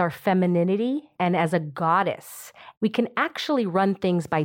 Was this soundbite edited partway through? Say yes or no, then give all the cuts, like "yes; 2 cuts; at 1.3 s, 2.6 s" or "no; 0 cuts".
yes; 2 cuts; at 1.1 s, 2.7 s